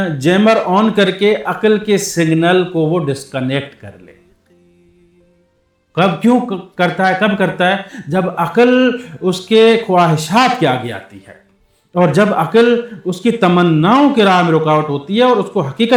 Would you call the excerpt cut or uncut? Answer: uncut